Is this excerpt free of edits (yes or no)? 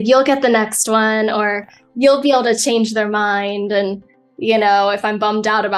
yes